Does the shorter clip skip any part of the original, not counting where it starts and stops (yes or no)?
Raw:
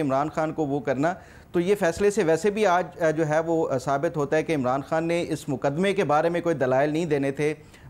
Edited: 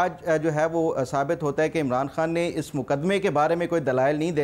no